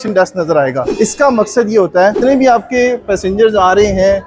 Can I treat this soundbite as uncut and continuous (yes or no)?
no